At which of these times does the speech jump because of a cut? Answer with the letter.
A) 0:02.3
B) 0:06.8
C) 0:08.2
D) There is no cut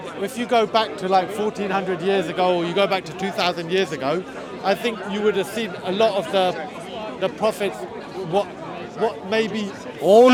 D